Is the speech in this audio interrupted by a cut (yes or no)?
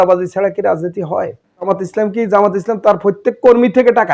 yes